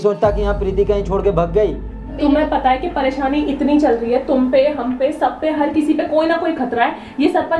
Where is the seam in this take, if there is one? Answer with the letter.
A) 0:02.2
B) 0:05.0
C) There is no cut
A